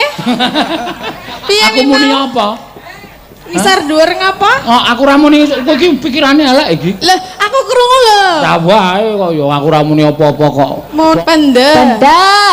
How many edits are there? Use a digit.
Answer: 1